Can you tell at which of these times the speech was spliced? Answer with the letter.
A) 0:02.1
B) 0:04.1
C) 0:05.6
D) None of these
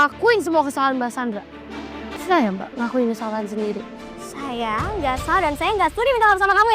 A